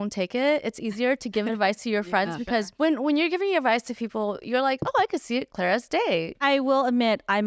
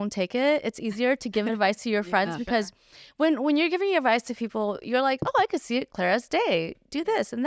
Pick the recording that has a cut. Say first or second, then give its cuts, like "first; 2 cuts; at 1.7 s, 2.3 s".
first; 2 cuts; at 2.7 s, 6.4 s